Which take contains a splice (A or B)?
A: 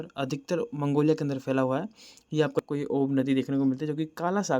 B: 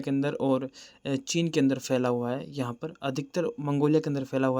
A